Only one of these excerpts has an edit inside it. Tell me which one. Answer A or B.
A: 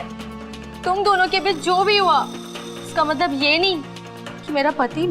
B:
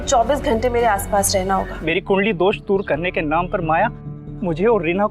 B